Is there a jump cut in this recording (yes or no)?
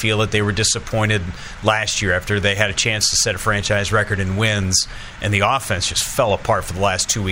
no